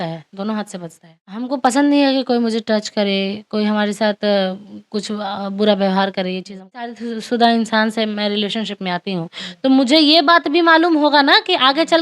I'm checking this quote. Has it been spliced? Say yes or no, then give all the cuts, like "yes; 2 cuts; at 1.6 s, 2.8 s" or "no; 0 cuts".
yes; 2 cuts; at 1.4 s, 7.0 s